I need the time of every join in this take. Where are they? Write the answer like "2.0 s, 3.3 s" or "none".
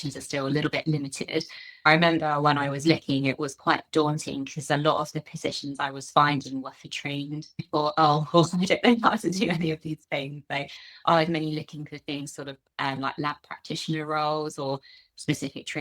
1.8 s, 7.6 s